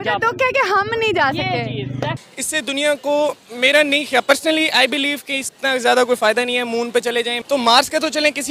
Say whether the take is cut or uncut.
cut